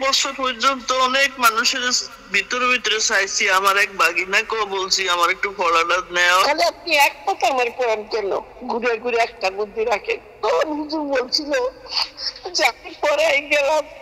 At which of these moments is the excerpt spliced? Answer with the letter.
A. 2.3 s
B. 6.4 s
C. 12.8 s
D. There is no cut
B